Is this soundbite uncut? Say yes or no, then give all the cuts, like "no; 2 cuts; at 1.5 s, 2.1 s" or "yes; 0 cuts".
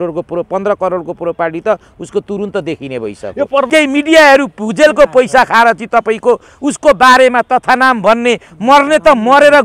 no; 1 cut; at 3.7 s